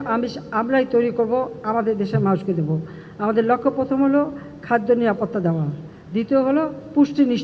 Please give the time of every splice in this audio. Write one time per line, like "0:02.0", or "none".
none